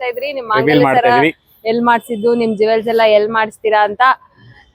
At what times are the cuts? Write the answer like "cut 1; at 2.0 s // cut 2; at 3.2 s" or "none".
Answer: none

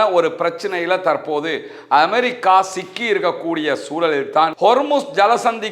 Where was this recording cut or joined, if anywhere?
cut 1; at 4.5 s

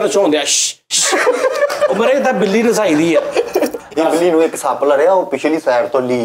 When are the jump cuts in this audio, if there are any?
cut 1; at 3.8 s

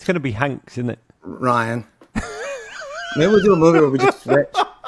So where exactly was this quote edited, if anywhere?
cut 1; at 2.0 s

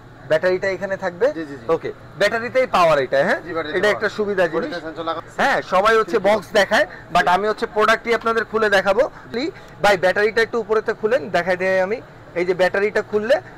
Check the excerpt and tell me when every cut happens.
cut 1; at 5.2 s // cut 2; at 9.3 s

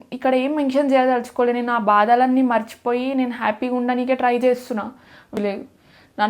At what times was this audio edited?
cut 1; at 5.3 s

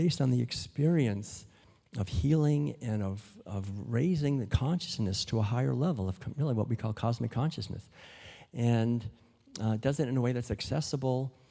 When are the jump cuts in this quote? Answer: none

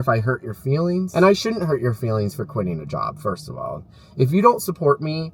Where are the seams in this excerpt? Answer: cut 1; at 1.1 s

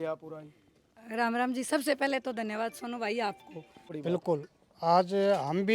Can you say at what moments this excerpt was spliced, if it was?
cut 1; at 3.9 s

